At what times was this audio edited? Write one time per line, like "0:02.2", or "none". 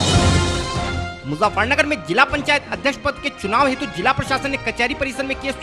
none